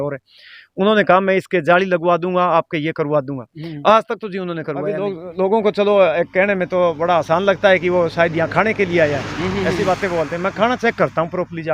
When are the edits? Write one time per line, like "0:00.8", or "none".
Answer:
0:04.9